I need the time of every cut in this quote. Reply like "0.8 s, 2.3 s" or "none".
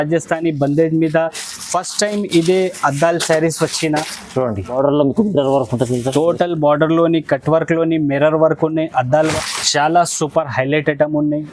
4.7 s, 9.3 s